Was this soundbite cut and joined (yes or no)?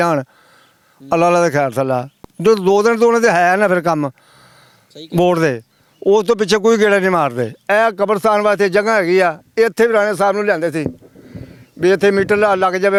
no